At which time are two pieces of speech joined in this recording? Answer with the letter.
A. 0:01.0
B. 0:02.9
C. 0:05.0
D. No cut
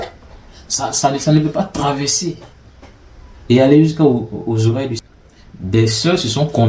C